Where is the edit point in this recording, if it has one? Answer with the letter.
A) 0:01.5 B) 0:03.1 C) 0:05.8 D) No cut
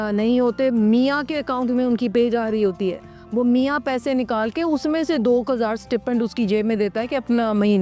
D